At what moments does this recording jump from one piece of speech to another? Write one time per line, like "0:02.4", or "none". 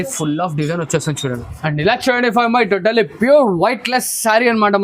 0:01.5